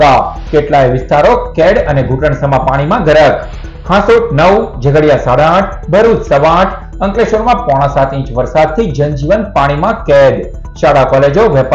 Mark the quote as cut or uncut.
uncut